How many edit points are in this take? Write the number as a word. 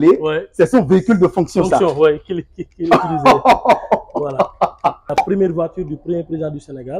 one